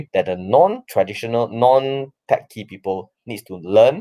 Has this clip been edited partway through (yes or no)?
no